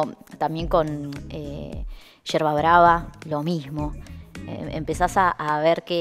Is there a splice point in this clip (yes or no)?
no